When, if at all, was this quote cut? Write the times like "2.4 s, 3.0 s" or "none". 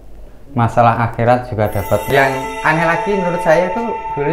2.1 s